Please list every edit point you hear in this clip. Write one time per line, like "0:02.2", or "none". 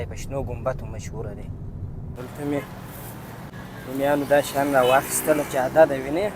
0:02.2
0:03.5